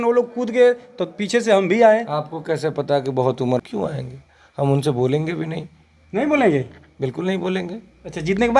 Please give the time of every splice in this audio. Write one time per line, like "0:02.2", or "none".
0:03.6

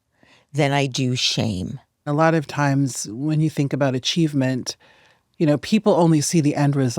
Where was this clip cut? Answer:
0:02.1

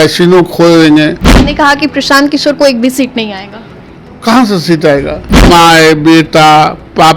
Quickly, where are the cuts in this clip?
0:01.3
0:05.5

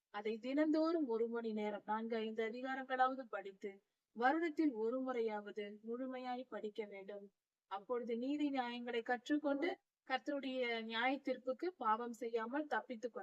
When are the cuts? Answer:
0:09.9

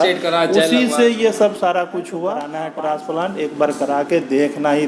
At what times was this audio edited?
0:02.6

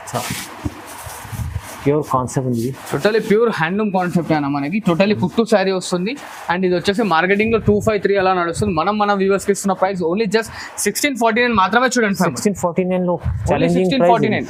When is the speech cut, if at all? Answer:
none

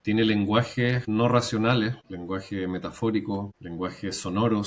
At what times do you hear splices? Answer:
0:01.0
0:02.1
0:03.6

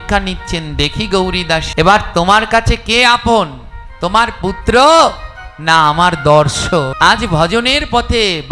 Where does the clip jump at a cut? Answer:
0:01.7
0:06.9

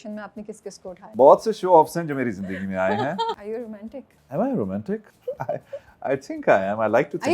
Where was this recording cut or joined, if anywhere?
0:01.1
0:03.4
0:05.1

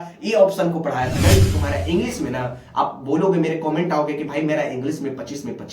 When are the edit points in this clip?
0:01.2

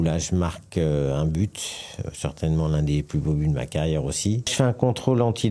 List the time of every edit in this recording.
0:04.5

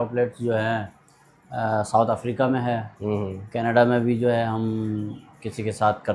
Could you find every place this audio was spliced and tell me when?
none

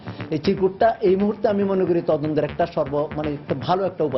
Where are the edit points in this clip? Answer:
none

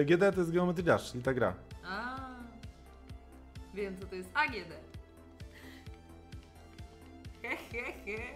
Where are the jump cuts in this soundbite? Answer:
none

